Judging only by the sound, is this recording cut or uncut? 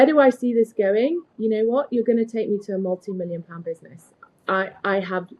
uncut